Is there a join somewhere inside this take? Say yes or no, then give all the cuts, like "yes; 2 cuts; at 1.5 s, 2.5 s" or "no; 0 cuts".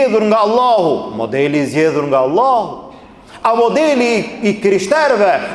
no; 0 cuts